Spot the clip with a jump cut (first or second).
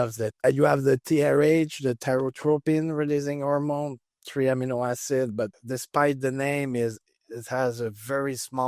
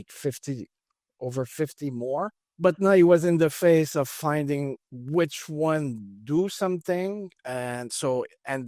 first